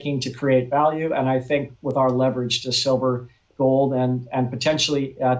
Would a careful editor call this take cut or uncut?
uncut